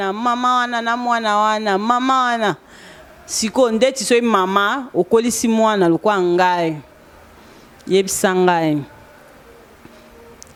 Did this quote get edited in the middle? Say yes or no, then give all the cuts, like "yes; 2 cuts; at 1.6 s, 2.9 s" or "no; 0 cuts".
no; 0 cuts